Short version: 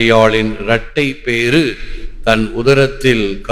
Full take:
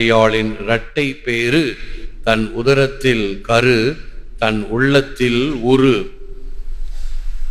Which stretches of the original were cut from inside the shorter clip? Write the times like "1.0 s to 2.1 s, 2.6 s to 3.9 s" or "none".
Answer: none